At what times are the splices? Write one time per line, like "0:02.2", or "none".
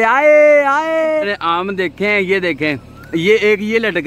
0:01.3